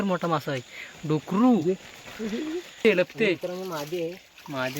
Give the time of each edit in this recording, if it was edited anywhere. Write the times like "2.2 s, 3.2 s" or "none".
2.8 s